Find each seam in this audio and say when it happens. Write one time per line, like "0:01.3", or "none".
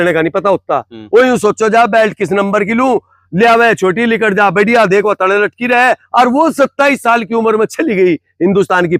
none